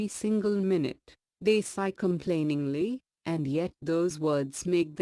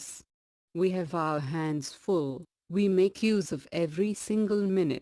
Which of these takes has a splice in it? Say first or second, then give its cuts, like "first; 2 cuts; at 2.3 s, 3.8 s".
first; 1 cut; at 2.2 s